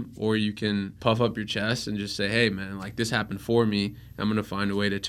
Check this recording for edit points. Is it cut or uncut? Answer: cut